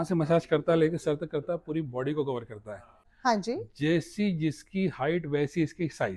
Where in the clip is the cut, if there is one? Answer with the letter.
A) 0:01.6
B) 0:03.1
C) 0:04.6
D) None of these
B